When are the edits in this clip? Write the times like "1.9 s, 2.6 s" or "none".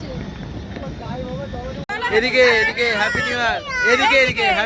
1.9 s

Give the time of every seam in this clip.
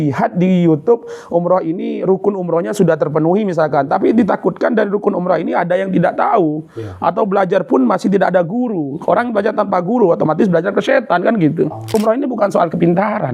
11.9 s

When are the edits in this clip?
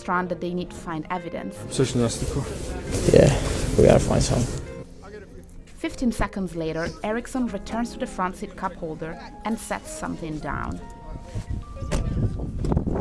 4.7 s

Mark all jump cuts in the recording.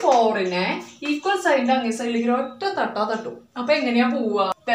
none

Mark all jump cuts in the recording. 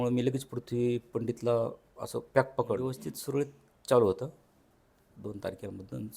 2.9 s

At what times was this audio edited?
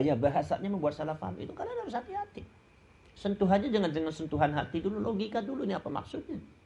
none

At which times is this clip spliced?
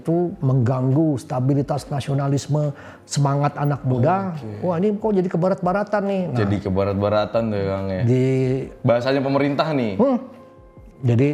none

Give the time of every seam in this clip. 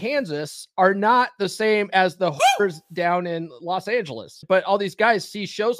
4.3 s

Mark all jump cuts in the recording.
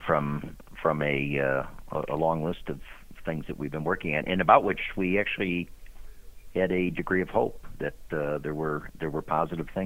none

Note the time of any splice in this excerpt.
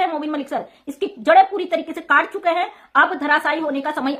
none

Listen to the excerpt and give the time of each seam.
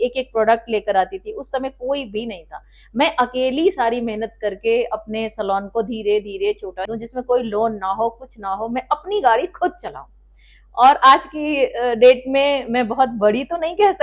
6.9 s

